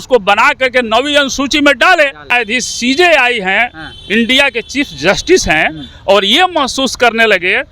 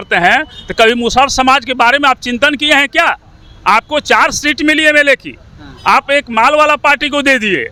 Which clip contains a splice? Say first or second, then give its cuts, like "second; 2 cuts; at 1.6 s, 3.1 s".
first; 1 cut; at 2.3 s